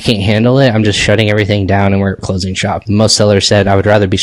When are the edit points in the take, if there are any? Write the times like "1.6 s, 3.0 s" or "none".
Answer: none